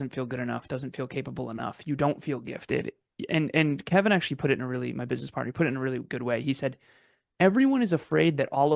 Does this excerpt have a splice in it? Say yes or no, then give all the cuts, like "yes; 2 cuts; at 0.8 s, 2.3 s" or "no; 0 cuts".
no; 0 cuts